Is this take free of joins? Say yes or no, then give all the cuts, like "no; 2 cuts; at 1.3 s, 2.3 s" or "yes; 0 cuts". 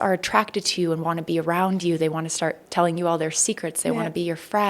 yes; 0 cuts